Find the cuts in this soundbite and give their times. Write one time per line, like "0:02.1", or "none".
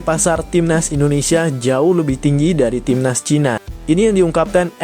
0:03.7